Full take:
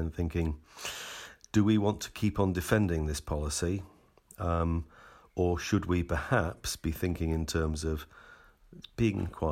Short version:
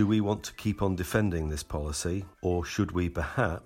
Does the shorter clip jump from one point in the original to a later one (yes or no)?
yes